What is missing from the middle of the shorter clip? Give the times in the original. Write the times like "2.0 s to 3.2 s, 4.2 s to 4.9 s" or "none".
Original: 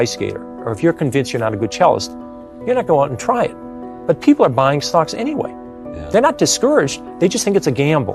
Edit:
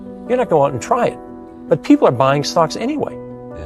none